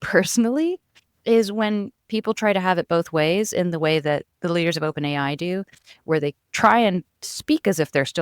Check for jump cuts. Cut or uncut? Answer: cut